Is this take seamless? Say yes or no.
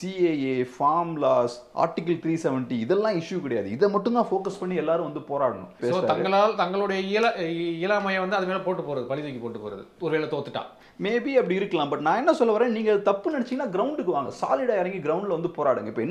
no